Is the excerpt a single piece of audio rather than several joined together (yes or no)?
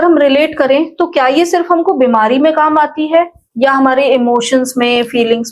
yes